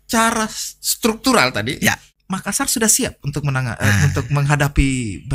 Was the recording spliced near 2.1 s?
yes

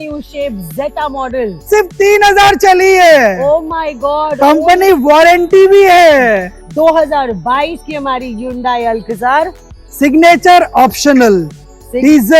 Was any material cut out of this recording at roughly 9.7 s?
no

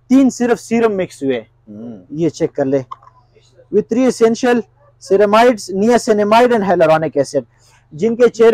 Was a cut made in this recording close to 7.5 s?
no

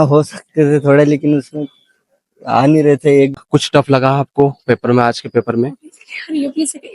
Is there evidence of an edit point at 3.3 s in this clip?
yes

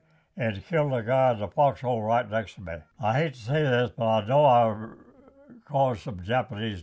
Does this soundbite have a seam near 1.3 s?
no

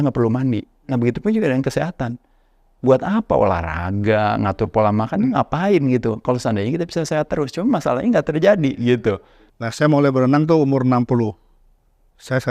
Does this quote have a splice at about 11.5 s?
no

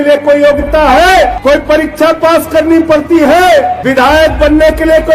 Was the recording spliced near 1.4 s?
yes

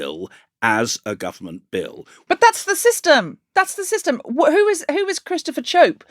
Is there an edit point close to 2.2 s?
yes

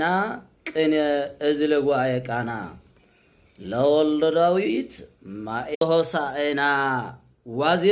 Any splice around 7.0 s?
no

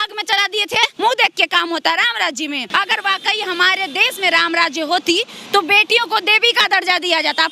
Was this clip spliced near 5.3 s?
no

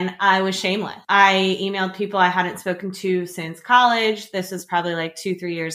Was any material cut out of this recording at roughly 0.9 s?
yes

